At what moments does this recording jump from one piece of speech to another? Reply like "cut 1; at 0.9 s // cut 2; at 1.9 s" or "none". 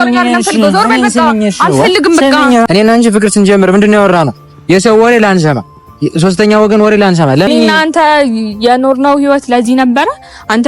cut 1; at 2.7 s // cut 2; at 7.5 s